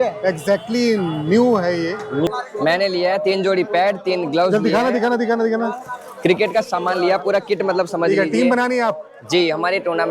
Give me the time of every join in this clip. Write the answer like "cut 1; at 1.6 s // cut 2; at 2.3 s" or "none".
cut 1; at 2.3 s